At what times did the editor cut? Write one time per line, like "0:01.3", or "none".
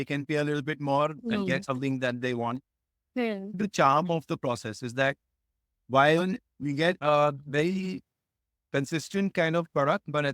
0:03.6
0:07.0